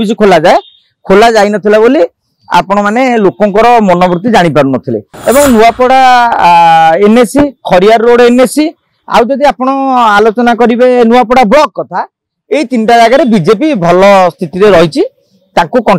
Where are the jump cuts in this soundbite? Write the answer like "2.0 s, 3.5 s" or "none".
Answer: 5.0 s